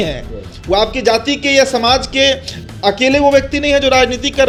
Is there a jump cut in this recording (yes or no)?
no